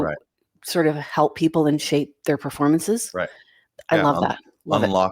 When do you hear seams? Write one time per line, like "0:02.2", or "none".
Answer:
none